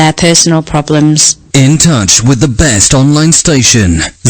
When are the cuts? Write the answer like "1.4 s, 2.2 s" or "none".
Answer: none